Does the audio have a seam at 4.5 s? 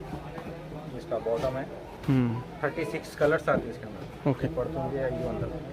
yes; 1 cut; at 4.5 s

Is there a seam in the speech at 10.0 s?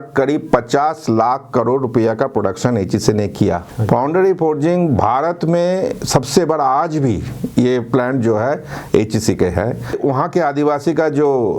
yes; 2 cuts; at 3.7 s, 10.0 s

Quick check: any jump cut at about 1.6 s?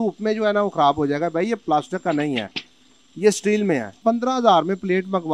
no; 1 cut; at 4.0 s

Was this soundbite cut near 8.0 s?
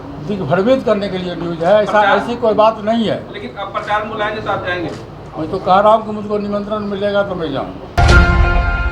yes; 1 cut; at 8.0 s

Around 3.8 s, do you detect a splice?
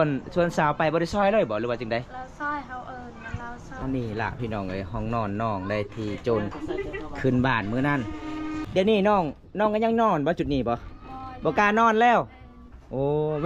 yes; 2 cuts; at 3.8 s, 8.6 s

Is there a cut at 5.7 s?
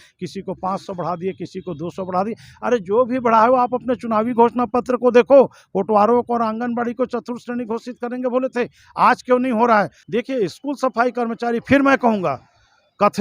no; 1 cut; at 10.0 s

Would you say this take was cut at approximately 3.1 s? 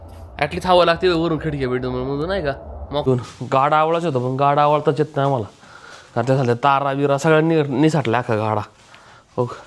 yes; 1 cut; at 3.1 s

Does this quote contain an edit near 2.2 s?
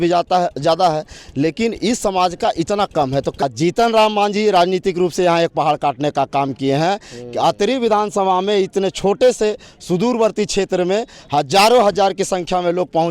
no; 1 cut; at 3.4 s

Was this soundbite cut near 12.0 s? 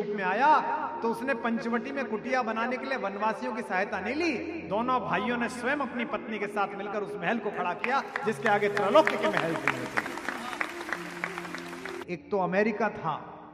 yes; 1 cut; at 12.0 s

